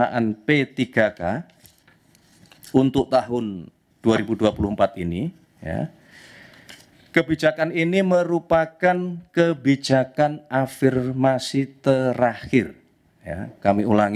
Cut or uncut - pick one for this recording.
uncut